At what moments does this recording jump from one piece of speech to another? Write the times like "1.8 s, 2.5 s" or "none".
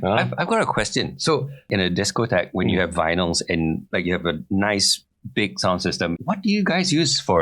1.7 s, 6.2 s